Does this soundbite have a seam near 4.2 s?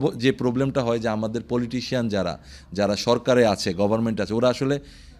no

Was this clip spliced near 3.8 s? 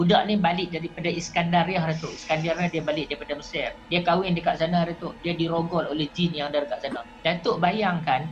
yes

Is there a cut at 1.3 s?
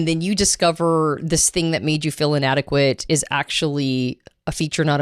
no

